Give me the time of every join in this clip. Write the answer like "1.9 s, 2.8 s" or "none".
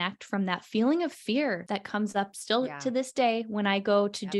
2.1 s